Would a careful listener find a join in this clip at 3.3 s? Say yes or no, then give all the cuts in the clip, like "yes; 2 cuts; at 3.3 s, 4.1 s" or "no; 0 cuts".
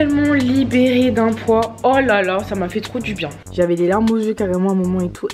yes; 1 cut; at 3.3 s